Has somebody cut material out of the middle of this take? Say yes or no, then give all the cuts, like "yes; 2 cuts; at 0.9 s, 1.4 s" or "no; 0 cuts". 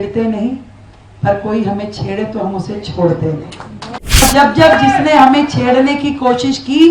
yes; 1 cut; at 4.2 s